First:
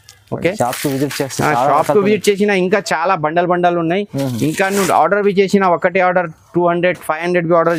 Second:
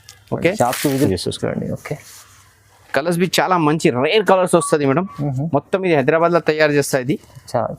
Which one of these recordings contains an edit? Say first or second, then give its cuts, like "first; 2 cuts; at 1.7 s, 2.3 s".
second; 1 cut; at 1.1 s